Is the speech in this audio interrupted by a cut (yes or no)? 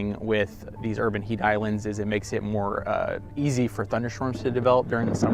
no